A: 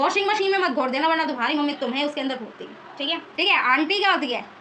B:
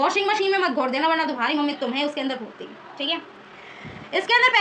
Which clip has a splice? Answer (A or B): A